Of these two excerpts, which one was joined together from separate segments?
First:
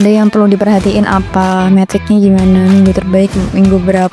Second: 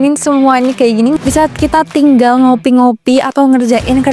second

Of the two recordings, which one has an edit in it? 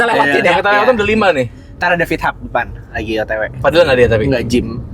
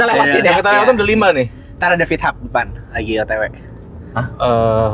first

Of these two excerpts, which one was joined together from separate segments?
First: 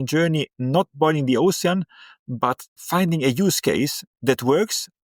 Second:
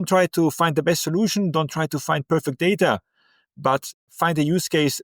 second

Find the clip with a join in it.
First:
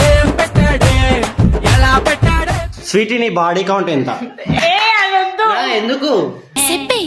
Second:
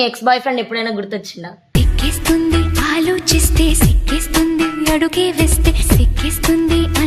first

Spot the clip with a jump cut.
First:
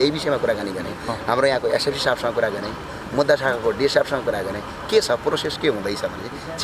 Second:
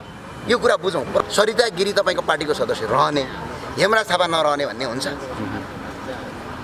second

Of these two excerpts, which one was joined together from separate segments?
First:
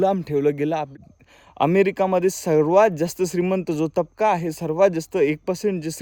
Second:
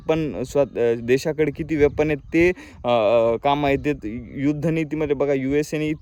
first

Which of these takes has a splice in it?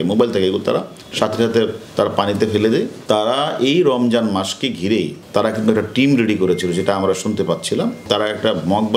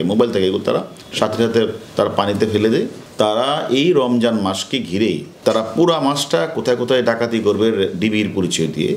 first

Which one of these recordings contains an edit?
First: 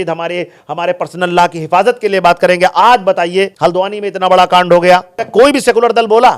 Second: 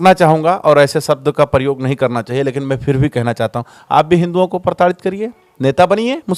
first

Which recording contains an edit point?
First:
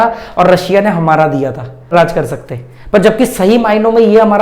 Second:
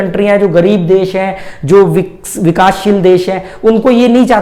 first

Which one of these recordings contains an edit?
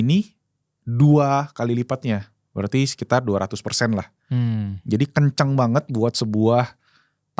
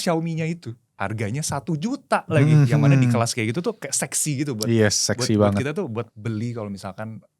second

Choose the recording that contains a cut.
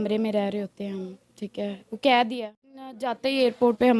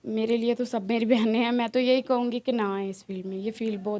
first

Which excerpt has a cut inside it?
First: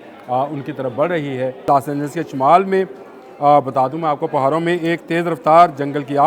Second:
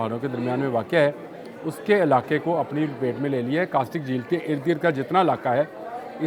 first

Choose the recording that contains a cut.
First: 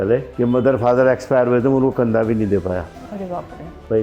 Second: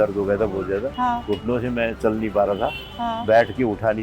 second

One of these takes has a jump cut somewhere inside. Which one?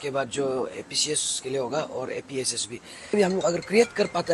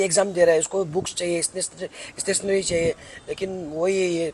first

